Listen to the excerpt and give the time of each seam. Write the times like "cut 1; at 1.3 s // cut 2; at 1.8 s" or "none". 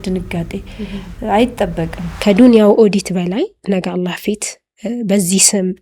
cut 1; at 2.0 s

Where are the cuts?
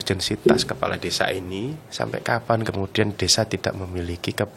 cut 1; at 1.8 s

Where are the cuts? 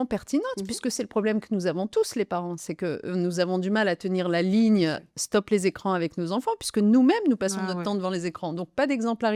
none

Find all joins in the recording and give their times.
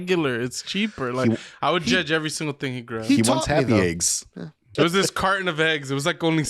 cut 1; at 4.7 s

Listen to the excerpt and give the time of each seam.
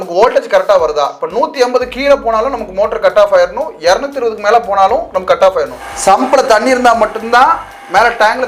cut 1; at 5.8 s

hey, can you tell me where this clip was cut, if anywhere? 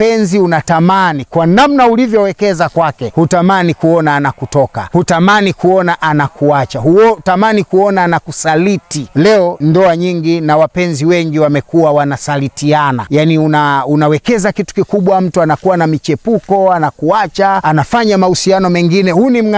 cut 1; at 3.0 s // cut 2; at 4.8 s // cut 3; at 9.4 s // cut 4; at 13.0 s // cut 5; at 17.6 s

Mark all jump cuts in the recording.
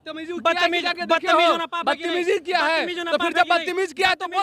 none

